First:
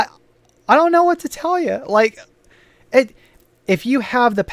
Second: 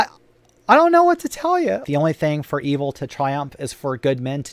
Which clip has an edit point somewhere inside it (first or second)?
second